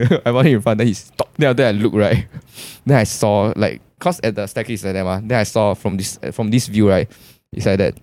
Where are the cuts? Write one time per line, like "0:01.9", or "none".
0:01.2